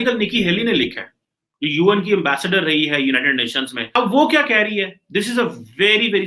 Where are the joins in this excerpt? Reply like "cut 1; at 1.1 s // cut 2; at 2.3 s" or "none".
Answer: cut 1; at 4.0 s